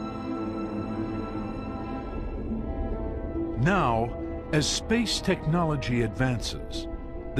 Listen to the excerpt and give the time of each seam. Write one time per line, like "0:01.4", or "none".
none